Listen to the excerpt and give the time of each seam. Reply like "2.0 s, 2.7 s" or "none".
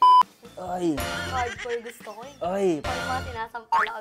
2.8 s